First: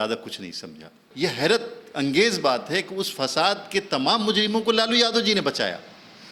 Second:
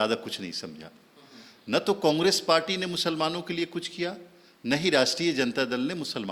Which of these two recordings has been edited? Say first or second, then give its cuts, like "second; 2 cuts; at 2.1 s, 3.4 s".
first; 1 cut; at 1.0 s